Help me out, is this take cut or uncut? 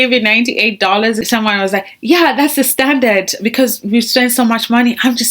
cut